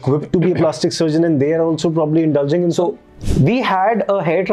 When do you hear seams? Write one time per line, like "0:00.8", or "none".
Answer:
0:03.1